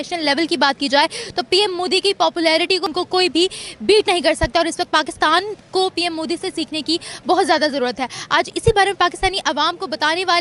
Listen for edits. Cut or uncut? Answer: uncut